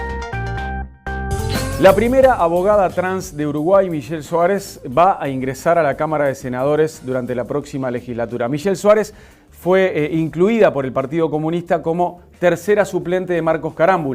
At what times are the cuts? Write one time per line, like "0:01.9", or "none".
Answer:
0:01.3